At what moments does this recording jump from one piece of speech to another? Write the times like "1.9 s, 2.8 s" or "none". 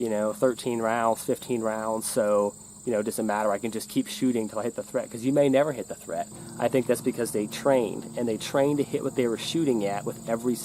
6.4 s